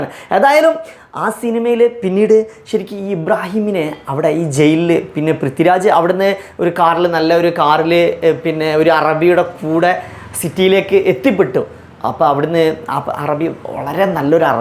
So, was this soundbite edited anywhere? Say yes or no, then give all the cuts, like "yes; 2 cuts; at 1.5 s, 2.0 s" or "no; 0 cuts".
no; 0 cuts